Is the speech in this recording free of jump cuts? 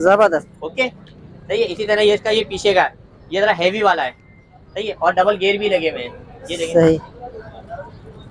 yes; 0 cuts

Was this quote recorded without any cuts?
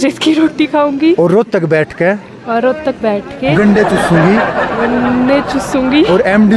yes; 0 cuts

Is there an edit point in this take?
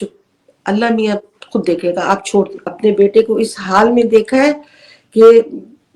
yes; 1 cut; at 2.6 s

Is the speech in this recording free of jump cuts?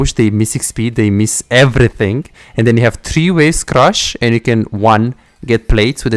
yes; 0 cuts

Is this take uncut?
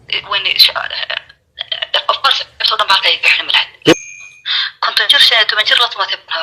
no; 1 cut; at 3.9 s

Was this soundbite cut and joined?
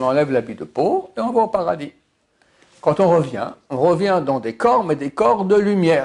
no; 0 cuts

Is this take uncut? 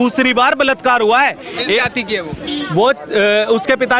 yes; 0 cuts

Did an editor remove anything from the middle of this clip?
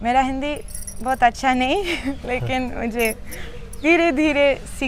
no; 0 cuts

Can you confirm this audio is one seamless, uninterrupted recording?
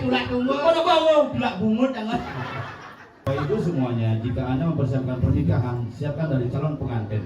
no; 1 cut; at 3.2 s

